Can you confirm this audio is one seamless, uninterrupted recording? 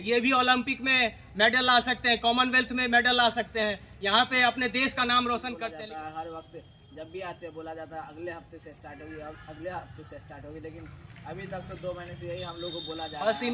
no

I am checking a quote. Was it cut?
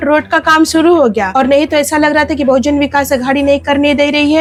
no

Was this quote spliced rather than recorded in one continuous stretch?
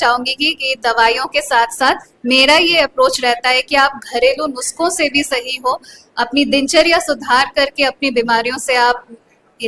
no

